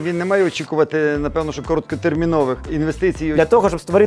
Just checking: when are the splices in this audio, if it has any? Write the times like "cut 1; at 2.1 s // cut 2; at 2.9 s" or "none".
cut 1; at 3.1 s